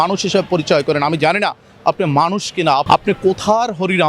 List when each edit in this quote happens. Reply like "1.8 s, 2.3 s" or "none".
2.8 s